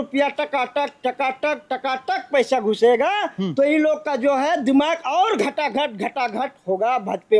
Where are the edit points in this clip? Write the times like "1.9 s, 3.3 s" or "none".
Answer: none